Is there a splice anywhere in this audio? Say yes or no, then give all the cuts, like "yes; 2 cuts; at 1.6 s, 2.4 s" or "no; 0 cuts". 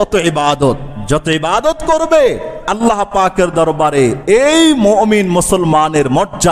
no; 0 cuts